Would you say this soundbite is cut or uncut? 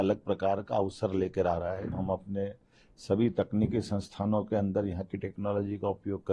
cut